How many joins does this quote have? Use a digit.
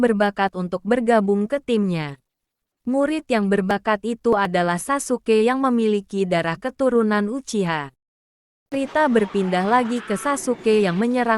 1